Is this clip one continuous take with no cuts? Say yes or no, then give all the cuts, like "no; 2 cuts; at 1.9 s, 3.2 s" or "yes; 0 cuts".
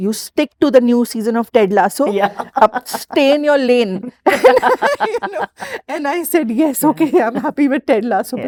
yes; 0 cuts